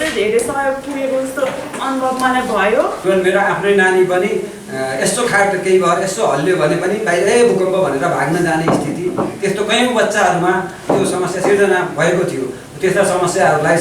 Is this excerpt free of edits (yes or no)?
no